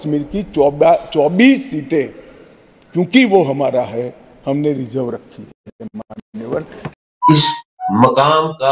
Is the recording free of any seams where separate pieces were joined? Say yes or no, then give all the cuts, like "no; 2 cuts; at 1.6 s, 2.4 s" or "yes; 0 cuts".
no; 1 cut; at 6.9 s